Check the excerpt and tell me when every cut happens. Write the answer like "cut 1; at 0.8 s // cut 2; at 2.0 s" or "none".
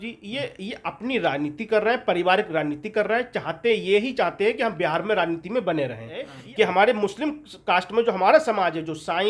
cut 1; at 6.4 s

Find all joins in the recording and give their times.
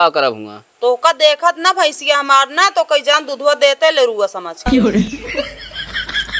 cut 1; at 4.5 s

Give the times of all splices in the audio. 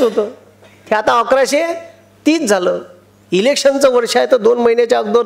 none

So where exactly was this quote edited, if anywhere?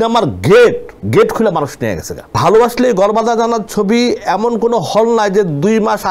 cut 1; at 0.9 s // cut 2; at 2.4 s

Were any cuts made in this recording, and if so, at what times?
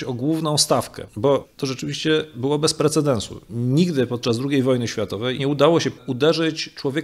cut 1; at 1.5 s // cut 2; at 5.4 s // cut 3; at 5.9 s

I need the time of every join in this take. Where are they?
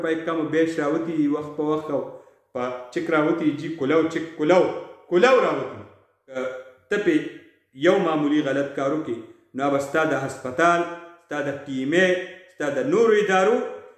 cut 1; at 6.4 s

